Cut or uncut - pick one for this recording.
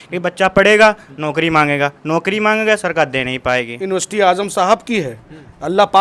cut